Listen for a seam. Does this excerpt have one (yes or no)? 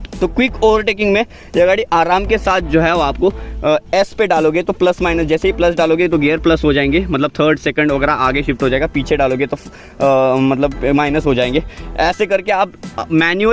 no